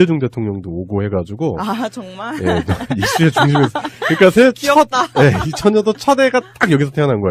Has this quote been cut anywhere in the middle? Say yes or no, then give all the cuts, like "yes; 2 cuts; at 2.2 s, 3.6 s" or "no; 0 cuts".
no; 0 cuts